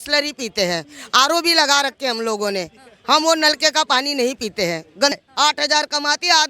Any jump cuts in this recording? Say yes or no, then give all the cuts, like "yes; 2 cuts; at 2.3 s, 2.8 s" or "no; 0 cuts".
yes; 1 cut; at 5.1 s